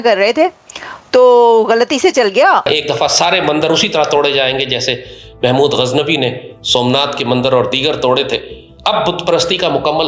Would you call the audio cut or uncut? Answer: cut